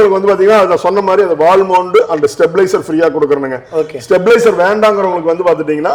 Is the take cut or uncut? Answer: uncut